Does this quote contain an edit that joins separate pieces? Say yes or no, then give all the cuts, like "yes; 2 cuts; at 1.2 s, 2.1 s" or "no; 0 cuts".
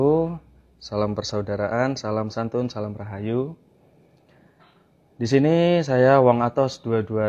no; 0 cuts